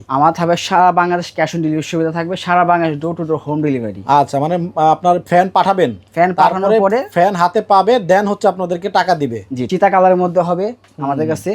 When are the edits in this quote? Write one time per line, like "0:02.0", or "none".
0:09.5